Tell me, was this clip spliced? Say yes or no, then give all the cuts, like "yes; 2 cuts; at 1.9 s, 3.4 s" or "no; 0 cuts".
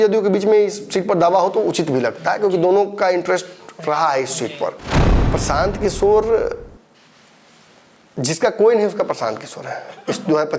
yes; 1 cut; at 5.1 s